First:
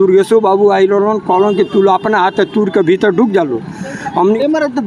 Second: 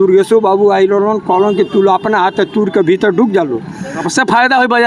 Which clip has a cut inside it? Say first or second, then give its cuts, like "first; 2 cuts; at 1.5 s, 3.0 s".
second; 1 cut; at 4.0 s